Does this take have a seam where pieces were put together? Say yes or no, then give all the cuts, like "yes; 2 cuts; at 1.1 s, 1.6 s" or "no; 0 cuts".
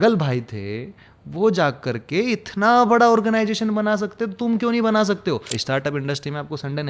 yes; 1 cut; at 5.6 s